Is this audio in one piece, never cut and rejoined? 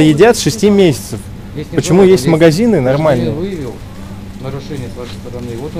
yes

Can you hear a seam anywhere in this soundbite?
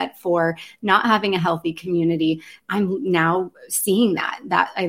no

